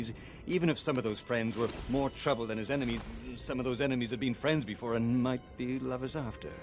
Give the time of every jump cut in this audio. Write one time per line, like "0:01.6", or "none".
none